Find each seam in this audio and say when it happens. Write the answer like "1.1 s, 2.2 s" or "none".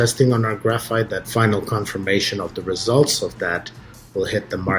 1.2 s

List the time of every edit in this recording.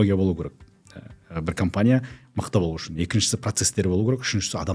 none

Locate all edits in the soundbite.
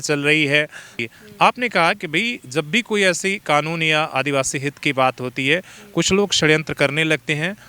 1.0 s

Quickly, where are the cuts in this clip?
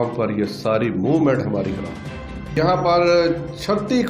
2.6 s

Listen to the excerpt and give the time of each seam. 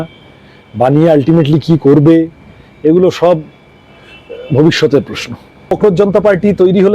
5.7 s

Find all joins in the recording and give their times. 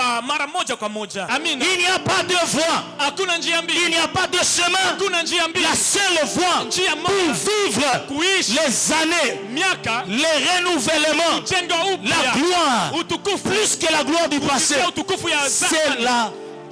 1.3 s

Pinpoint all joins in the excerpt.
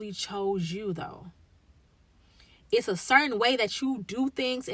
none

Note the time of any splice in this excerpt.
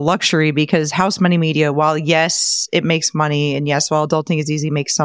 none

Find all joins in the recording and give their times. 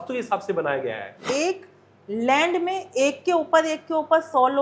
1.2 s

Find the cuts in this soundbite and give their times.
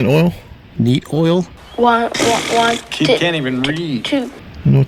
none

